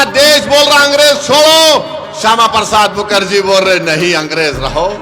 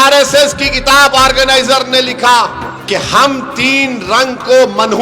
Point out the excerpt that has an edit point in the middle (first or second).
second